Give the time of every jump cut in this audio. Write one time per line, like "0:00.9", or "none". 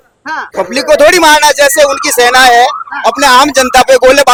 none

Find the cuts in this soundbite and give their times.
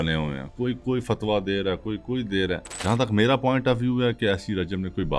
0:02.8

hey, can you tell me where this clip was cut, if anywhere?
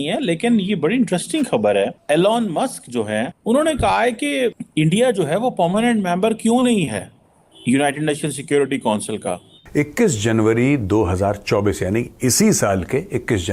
0:02.0
0:03.4
0:04.6
0:09.5

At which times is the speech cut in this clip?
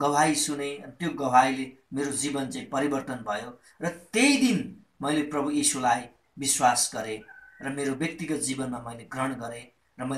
none

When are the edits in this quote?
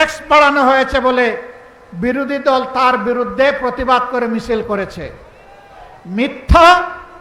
none

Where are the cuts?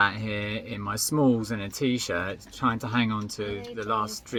none

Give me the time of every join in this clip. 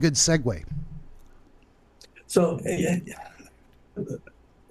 0:01.2

